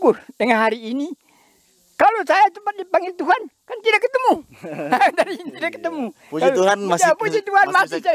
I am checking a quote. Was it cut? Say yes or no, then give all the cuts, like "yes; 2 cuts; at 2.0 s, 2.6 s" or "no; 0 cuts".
no; 0 cuts